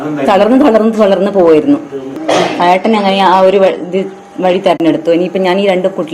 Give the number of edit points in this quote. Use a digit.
1